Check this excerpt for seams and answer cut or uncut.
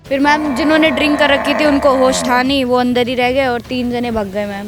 uncut